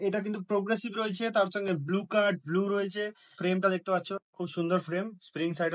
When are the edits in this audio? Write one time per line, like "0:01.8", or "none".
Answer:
0:03.4
0:04.2